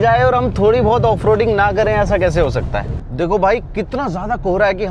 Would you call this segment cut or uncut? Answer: cut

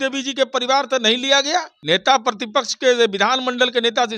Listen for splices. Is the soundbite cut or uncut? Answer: cut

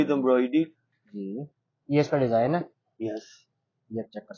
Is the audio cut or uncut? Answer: uncut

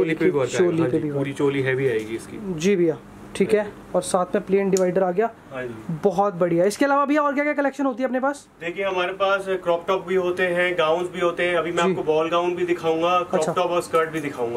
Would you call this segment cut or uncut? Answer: uncut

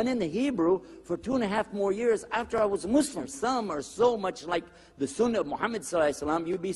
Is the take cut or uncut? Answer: cut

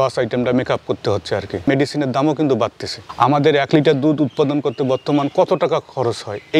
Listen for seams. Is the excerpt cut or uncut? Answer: cut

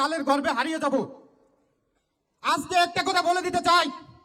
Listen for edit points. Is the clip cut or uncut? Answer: uncut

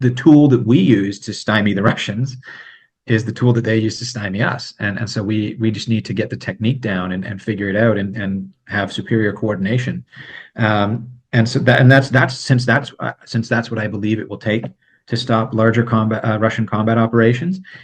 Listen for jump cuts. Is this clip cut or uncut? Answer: uncut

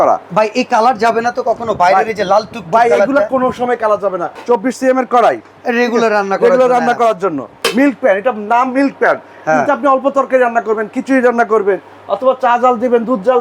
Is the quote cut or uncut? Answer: cut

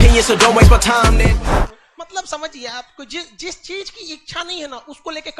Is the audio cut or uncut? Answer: cut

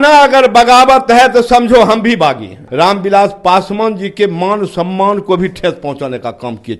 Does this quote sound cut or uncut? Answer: cut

